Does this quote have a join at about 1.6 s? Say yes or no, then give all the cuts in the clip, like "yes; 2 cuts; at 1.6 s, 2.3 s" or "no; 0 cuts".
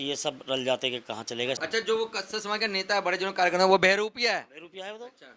yes; 1 cut; at 1.6 s